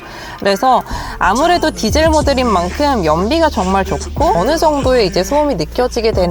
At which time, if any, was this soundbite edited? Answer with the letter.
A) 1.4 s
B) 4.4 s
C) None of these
B